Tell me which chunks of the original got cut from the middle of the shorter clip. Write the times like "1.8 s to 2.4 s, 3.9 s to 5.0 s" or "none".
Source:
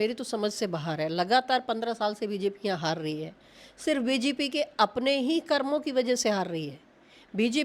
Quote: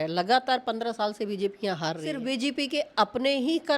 3.1 s to 3.9 s